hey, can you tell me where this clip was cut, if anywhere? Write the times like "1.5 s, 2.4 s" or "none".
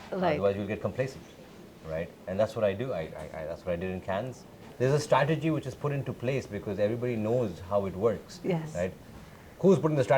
4.6 s